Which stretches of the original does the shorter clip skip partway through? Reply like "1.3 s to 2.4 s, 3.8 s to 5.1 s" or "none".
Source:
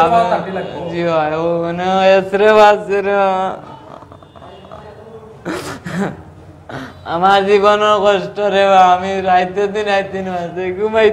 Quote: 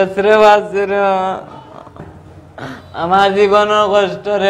4.2 s to 6.2 s